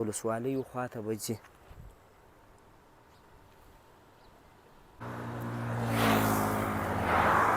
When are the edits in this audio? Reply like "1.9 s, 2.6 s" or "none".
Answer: 5.0 s

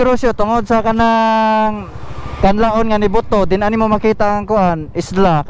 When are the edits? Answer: none

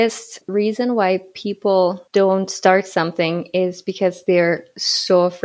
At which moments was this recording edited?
none

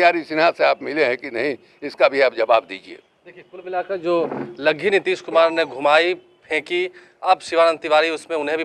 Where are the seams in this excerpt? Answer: none

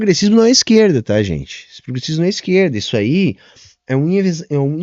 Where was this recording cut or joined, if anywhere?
none

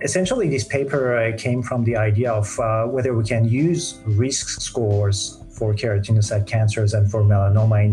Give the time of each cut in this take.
none

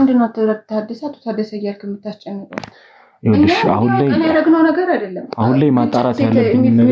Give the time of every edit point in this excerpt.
none

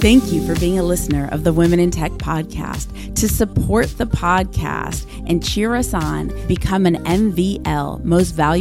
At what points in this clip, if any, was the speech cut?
none

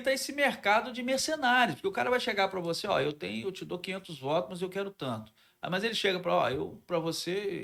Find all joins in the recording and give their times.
none

